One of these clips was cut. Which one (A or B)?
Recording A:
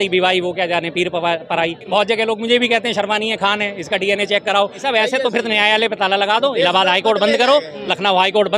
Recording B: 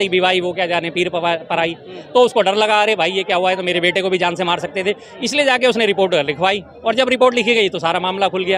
A